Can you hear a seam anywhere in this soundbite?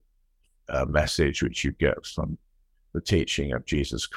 no; 0 cuts

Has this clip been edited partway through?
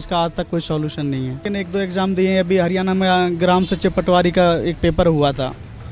yes; 1 cut; at 1.5 s

